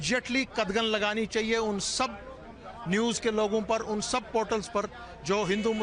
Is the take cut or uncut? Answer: uncut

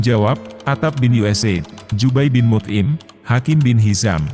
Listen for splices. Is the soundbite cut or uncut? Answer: uncut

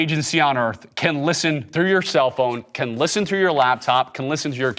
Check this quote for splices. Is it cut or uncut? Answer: uncut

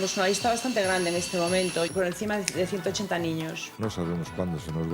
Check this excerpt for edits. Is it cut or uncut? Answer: cut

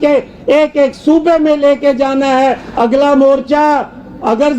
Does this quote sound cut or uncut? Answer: cut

